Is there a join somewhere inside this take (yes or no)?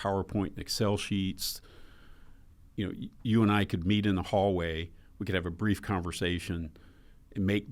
no